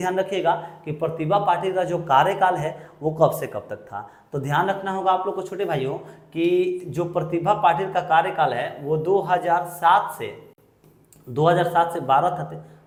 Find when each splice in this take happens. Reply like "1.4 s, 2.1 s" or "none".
none